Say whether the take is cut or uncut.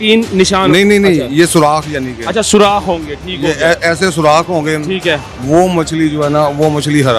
uncut